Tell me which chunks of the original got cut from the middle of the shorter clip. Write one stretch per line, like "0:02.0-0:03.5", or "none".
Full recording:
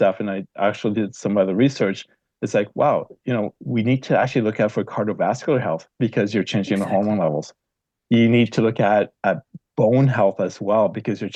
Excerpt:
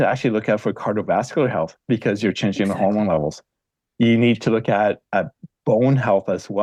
none

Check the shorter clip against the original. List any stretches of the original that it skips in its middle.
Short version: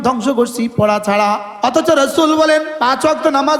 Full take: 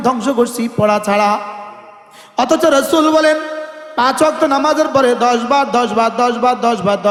0:01.5-0:02.2
0:03.5-0:03.9

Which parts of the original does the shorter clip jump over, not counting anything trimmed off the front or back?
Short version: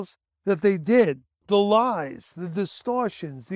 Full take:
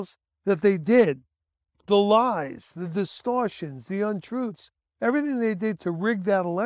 0:01.3-0:01.7

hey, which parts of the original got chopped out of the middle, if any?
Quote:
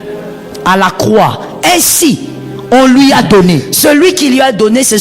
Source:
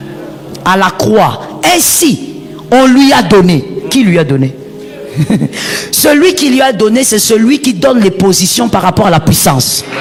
0:03.7-0:05.9

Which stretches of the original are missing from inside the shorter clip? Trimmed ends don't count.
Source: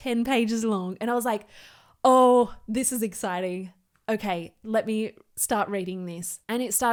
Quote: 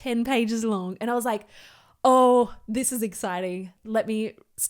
0:03.8-0:04.6

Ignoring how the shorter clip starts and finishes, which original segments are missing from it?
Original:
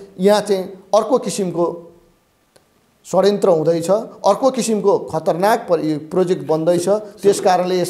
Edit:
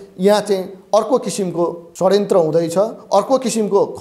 0:01.8-0:03.0

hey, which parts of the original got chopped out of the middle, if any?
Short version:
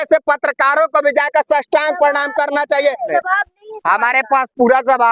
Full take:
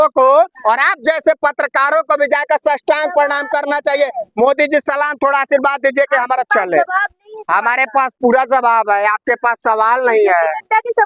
0:04.2-0:06.7

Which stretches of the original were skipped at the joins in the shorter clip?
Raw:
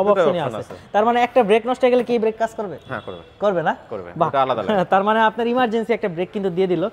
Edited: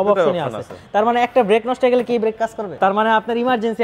0:02.8-0:04.9

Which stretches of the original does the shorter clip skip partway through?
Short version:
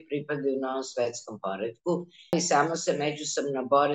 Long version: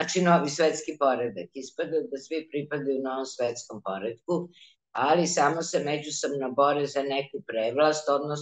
0:04.8-0:05.2

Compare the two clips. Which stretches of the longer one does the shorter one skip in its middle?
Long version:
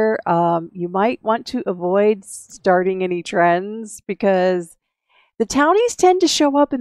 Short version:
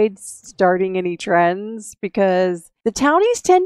0:04.7-0:05.2

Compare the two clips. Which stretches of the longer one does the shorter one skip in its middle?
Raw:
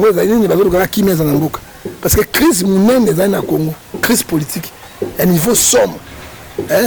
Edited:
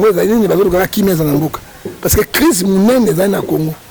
none

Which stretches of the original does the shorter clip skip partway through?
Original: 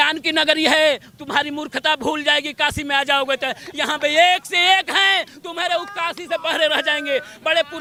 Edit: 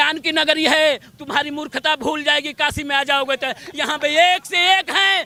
none

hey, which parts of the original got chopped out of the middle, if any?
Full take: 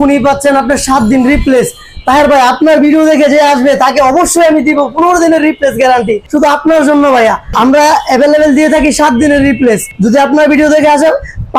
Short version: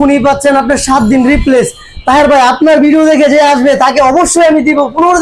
none

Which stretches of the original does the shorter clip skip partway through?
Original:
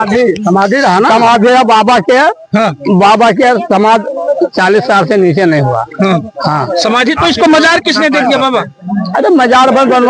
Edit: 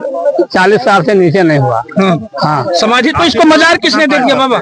none

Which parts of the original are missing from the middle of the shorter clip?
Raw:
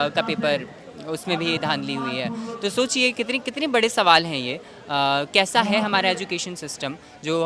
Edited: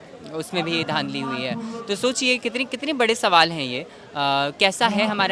none

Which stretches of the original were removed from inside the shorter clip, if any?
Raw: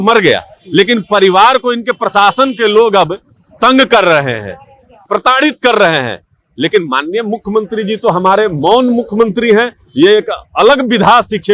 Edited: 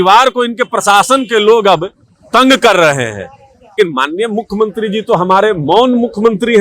0:05.0-0:06.7

